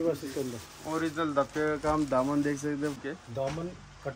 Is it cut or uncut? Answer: cut